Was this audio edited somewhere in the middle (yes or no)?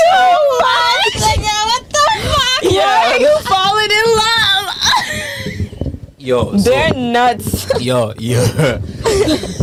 no